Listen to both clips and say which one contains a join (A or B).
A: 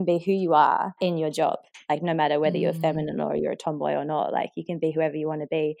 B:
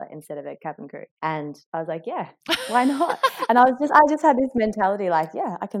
A